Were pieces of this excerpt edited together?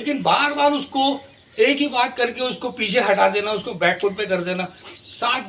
no; 0 cuts

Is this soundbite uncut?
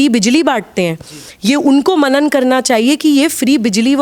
yes; 0 cuts

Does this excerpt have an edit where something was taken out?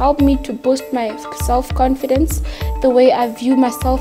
no; 0 cuts

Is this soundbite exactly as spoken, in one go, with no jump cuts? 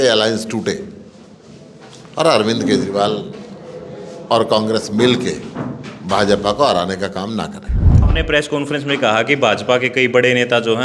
no; 1 cut; at 7.8 s

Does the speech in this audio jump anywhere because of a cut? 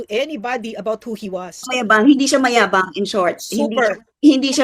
yes; 1 cut; at 1.7 s

